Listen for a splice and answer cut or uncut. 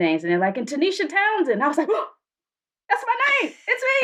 uncut